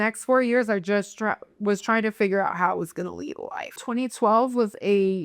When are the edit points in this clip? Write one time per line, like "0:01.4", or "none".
0:03.8